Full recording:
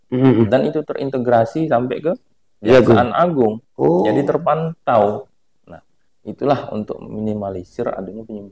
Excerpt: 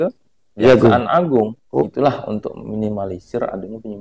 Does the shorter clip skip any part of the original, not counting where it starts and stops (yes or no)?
yes